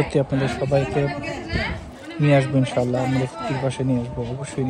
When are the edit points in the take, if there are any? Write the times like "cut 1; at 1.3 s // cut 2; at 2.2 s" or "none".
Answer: none

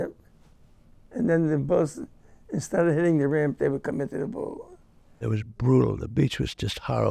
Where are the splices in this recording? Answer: cut 1; at 5.2 s

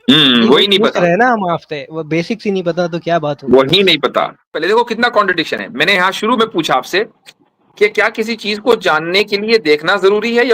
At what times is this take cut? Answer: cut 1; at 4.5 s

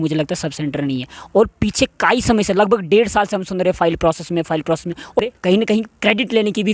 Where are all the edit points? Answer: cut 1; at 5.2 s

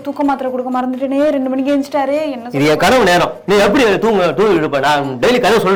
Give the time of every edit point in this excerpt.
none

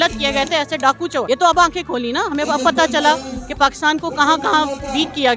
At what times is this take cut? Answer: none

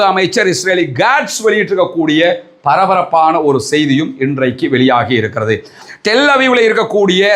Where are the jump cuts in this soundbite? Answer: cut 1; at 5.8 s

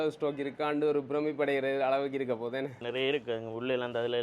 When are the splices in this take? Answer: cut 1; at 2.8 s

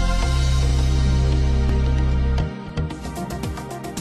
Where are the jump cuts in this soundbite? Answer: none

